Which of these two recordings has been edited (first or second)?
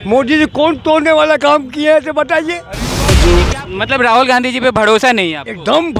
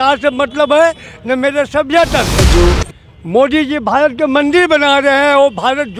first